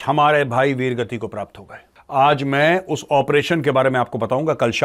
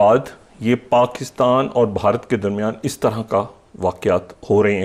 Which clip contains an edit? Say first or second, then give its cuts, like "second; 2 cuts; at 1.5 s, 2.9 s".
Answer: first; 1 cut; at 1.9 s